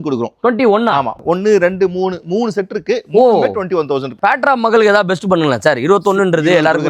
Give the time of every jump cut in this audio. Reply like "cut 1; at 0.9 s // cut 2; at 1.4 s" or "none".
cut 1; at 1.2 s // cut 2; at 4.1 s